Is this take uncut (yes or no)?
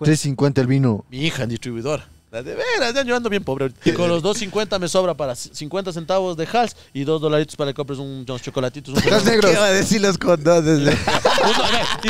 no